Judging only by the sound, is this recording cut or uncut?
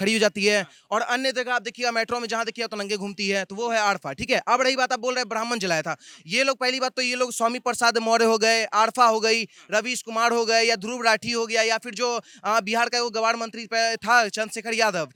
uncut